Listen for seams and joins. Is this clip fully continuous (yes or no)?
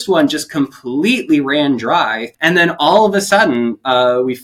no